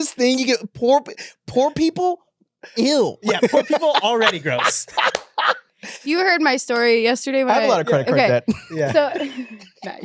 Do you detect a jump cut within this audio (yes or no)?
yes